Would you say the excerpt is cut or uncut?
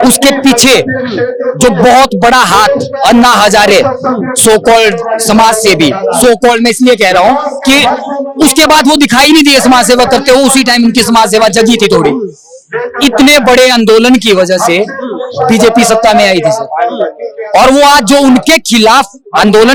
uncut